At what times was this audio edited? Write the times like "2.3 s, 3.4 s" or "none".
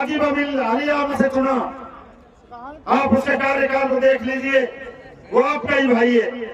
1.1 s